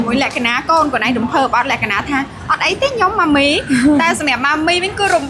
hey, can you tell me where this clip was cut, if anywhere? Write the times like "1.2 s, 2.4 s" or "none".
none